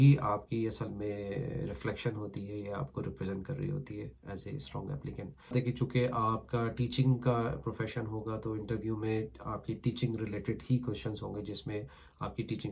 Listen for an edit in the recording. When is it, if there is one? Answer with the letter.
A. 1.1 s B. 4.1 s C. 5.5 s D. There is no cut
C